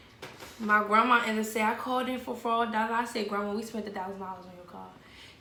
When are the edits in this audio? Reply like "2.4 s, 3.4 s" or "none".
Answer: none